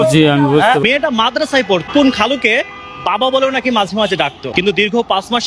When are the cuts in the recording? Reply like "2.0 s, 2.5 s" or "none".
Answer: 0.8 s, 1.9 s, 4.4 s